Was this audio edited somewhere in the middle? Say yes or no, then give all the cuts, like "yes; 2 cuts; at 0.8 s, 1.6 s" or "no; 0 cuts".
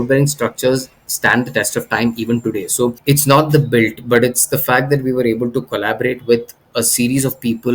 yes; 1 cut; at 3.0 s